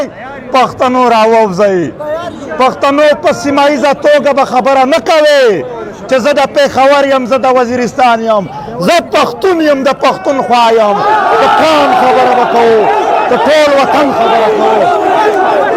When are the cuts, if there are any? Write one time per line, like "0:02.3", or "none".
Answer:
none